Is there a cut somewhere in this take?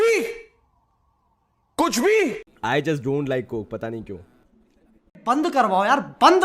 yes; 1 cut; at 2.5 s

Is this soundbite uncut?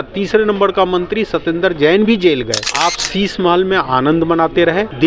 no; 1 cut; at 2.7 s

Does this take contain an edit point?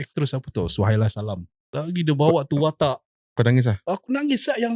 yes; 1 cut; at 1.7 s

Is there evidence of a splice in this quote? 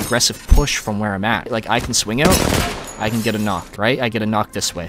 yes; 2 cuts; at 1.5 s, 3.7 s

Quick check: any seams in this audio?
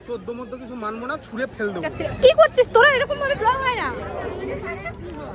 yes; 1 cut; at 2.0 s

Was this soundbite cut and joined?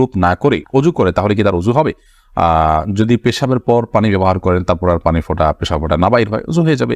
no; 0 cuts

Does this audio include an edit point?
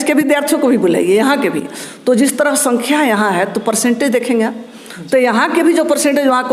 no; 0 cuts

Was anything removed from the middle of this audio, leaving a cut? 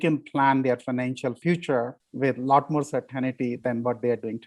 yes; 3 cuts; at 1.4 s, 2.0 s, 3.6 s

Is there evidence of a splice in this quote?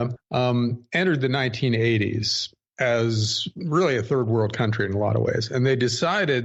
no; 0 cuts

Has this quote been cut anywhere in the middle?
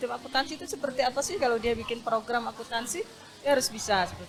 no; 0 cuts

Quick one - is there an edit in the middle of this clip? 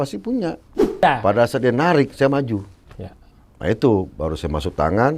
yes; 1 cut; at 1.0 s

